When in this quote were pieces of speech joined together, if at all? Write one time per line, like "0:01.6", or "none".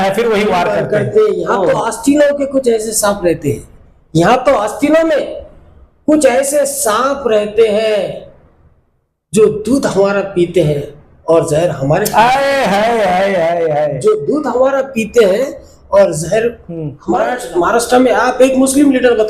0:16.9

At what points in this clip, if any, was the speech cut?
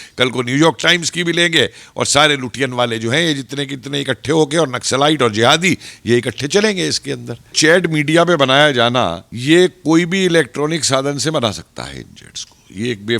0:07.5
0:09.3

